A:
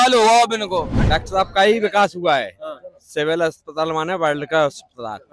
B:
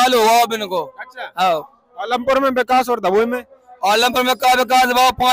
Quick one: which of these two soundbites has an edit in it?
A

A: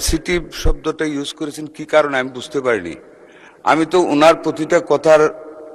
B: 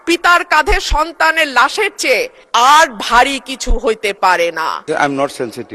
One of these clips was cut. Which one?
B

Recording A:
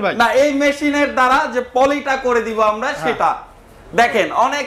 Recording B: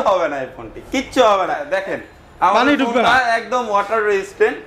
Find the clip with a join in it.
B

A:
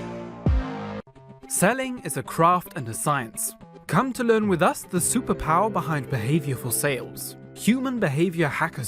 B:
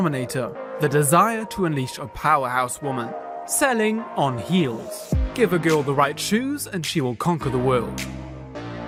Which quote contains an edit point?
A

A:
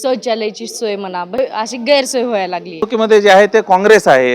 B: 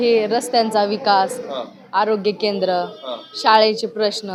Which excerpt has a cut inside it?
A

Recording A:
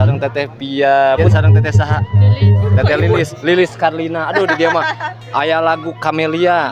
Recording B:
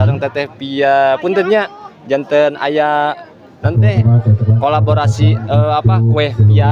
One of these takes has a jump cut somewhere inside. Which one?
A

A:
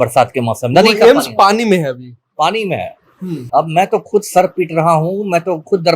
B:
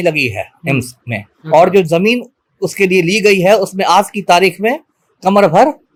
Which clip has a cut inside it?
A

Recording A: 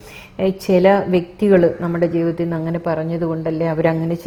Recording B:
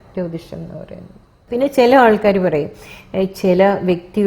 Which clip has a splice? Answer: B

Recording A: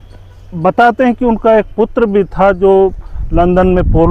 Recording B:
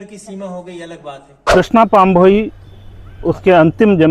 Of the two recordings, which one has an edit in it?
B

